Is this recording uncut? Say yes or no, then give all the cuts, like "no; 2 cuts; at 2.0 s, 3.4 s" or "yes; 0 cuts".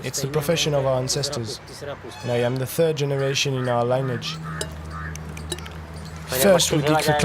no; 1 cut; at 4.7 s